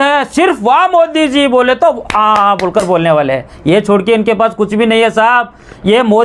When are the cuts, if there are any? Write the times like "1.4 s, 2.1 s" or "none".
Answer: none